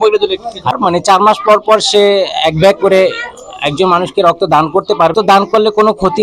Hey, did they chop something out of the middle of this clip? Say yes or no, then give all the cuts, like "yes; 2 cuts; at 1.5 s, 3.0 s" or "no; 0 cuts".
yes; 2 cuts; at 0.8 s, 5.1 s